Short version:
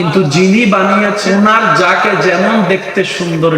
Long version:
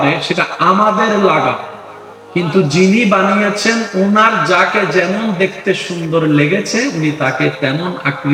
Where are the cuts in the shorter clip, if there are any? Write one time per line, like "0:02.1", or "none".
0:01.2